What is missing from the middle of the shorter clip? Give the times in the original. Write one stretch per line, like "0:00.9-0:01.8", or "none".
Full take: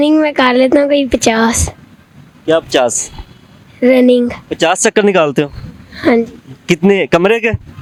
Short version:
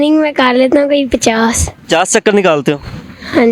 0:01.7-0:04.4